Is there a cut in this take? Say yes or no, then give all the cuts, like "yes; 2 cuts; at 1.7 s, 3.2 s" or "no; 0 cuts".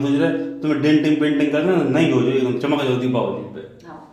no; 0 cuts